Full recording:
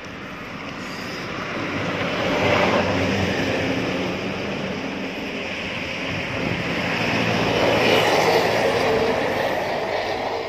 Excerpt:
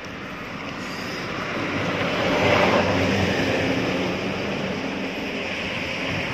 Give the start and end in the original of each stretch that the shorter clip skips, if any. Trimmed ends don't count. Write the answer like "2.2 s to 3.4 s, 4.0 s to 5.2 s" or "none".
none

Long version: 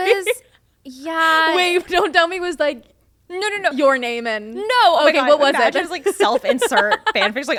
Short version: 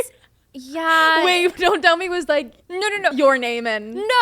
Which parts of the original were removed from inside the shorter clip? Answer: 2.9 s to 3.2 s

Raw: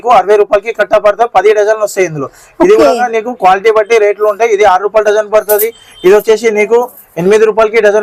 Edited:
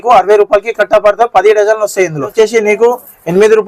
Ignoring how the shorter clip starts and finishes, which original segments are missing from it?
2.3 s to 6.2 s

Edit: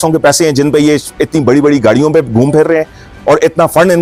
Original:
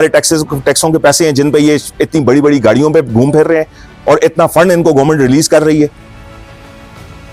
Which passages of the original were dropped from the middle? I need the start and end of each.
none

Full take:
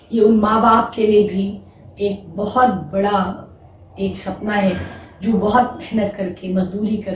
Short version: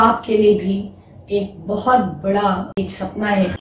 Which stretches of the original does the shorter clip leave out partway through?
3.4 s to 3.9 s

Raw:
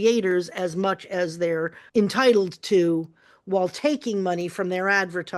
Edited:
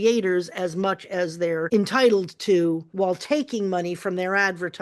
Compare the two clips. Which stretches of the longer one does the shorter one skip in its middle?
1.7 s to 1.9 s, 3.1 s to 3.4 s

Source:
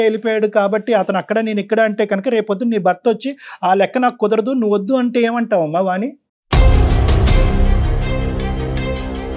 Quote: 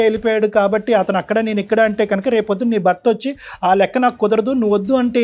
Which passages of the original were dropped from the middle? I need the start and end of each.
none

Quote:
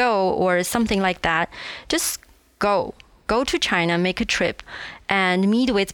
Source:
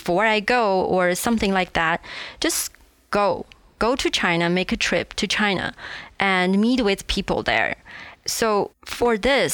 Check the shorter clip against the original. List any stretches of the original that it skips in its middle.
5.1 s to 5.7 s

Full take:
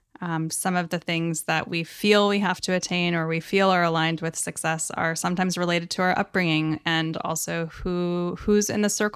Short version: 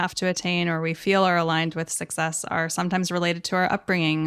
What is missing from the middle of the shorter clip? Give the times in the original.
none

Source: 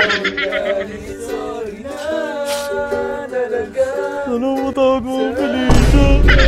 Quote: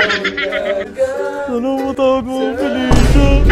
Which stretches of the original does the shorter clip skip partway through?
0.9 s to 3.7 s

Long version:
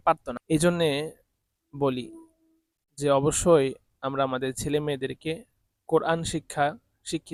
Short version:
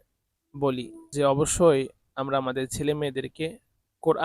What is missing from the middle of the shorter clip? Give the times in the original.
2.2 s to 2.8 s

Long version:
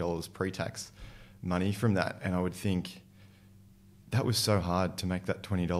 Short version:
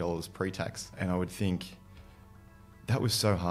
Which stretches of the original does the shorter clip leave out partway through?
0.9 s to 2.2 s

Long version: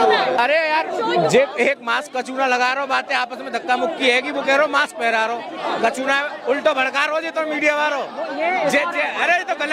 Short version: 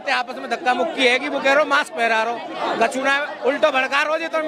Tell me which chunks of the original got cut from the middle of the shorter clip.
none

